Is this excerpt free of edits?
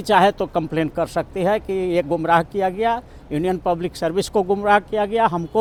yes; 0 cuts

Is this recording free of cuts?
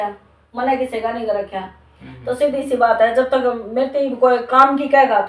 yes; 0 cuts

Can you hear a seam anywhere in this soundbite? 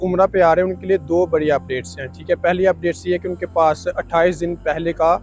no; 0 cuts

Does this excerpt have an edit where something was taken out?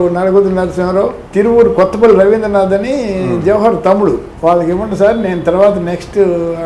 yes; 2 cuts; at 1.2 s, 4.3 s

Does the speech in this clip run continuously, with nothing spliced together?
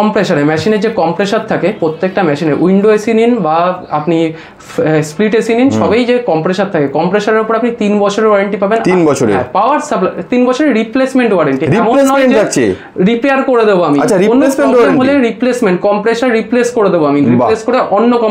yes; 0 cuts

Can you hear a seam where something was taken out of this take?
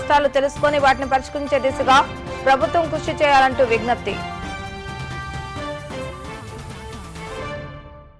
no; 0 cuts

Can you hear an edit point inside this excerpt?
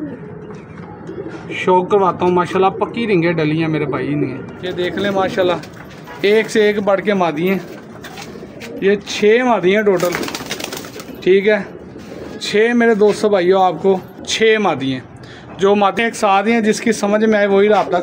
yes; 3 cuts; at 4.6 s, 14.2 s, 16.0 s

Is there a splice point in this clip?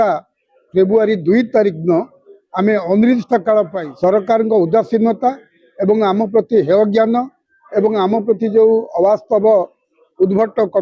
yes; 1 cut; at 3.8 s

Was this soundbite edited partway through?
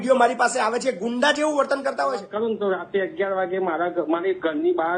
yes; 1 cut; at 2.2 s

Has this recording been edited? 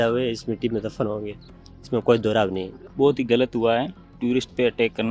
yes; 1 cut; at 2.8 s

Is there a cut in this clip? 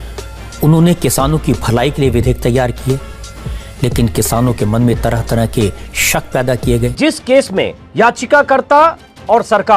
yes; 2 cuts; at 6.9 s, 7.8 s

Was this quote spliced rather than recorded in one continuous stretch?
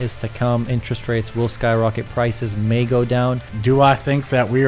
yes; 1 cut; at 3.5 s

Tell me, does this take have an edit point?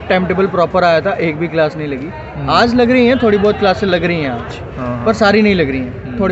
no; 0 cuts

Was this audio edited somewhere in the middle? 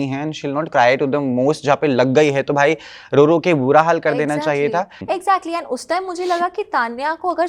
yes; 1 cut; at 5.0 s

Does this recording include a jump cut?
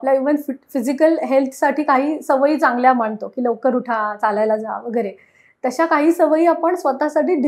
no; 0 cuts

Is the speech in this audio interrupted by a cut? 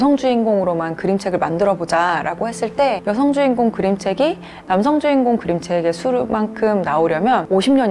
no; 0 cuts

